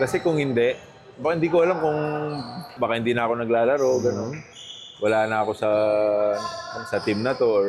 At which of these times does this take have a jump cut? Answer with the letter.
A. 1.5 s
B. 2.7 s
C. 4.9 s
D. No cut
B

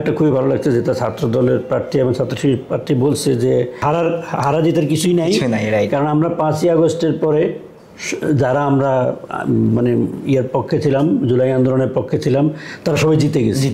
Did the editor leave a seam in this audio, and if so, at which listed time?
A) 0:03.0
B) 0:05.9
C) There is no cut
C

